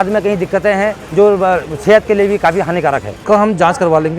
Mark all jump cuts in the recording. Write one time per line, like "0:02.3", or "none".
0:01.0
0:03.1